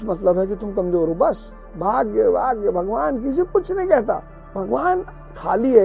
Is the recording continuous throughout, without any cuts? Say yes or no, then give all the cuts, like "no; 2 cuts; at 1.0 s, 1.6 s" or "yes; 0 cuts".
yes; 0 cuts